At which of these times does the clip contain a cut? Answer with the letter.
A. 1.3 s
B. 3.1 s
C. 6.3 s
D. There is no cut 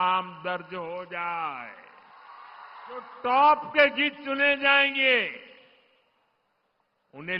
B